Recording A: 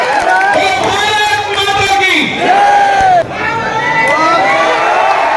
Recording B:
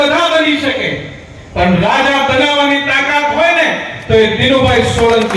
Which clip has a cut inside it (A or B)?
A